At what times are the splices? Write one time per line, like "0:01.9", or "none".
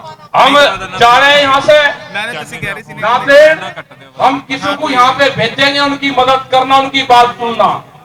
none